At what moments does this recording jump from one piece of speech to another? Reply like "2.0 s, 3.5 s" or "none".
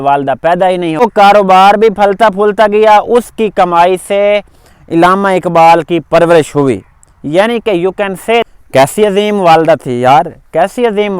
1.0 s, 8.5 s